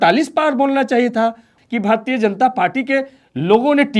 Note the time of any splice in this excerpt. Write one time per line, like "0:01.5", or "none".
0:01.6